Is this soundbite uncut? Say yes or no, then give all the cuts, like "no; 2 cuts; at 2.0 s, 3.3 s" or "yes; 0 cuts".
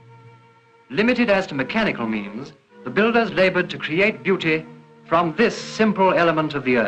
no; 1 cut; at 5.9 s